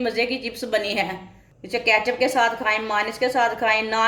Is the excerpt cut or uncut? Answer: cut